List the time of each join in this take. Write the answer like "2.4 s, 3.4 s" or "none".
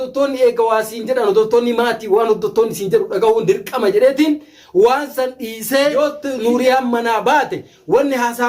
6.0 s